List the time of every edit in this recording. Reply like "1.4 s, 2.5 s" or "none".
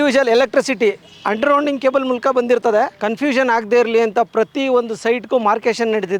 2.9 s